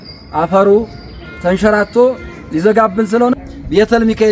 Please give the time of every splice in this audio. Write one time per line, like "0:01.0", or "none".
0:03.4

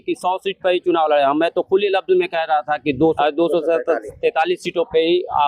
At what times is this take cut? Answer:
0:03.2

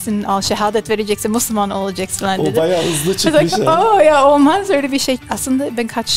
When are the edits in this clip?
0:05.2

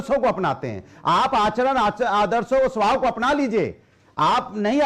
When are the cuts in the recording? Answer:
none

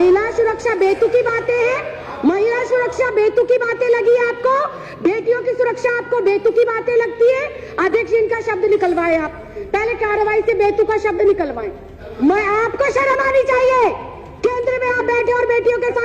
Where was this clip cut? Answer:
none

